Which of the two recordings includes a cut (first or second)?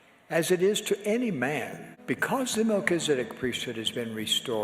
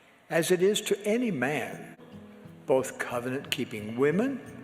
second